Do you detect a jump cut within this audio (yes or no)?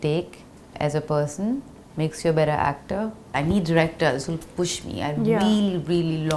yes